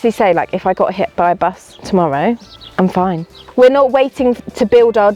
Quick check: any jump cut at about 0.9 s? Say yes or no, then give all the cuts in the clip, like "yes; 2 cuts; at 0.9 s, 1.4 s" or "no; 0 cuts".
no; 2 cuts; at 2.6 s, 3.4 s